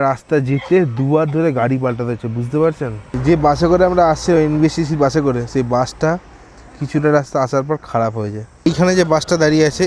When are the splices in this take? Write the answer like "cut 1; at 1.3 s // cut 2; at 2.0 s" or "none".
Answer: cut 1; at 3.1 s // cut 2; at 8.7 s